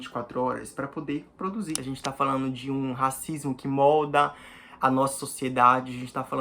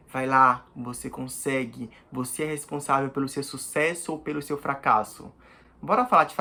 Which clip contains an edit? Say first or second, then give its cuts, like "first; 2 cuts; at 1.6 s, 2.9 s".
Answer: first; 1 cut; at 1.8 s